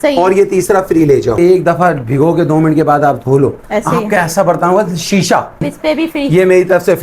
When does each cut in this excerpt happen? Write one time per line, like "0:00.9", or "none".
0:01.4
0:05.6